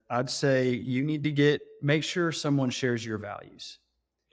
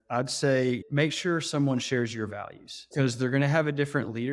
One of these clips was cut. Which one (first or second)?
second